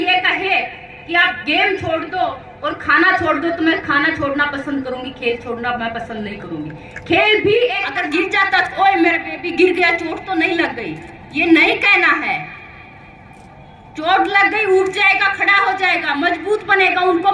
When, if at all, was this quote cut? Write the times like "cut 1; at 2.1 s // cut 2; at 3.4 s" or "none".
cut 1; at 7.9 s